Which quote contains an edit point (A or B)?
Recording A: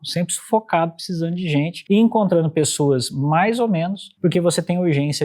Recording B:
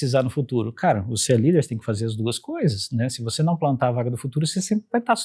A